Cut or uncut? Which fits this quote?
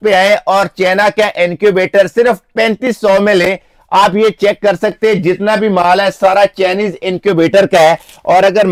uncut